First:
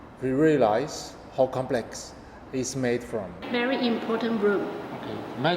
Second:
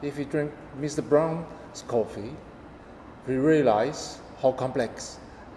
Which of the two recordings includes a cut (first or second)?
first